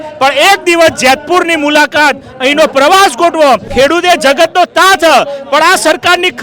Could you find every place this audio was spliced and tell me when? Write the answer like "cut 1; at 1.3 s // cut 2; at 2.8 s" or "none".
cut 1; at 3.7 s